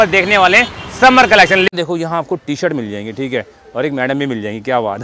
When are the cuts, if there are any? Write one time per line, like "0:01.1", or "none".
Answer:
0:01.7